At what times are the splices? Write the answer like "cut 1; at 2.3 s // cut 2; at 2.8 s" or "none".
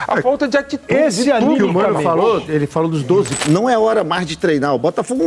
cut 1; at 3.4 s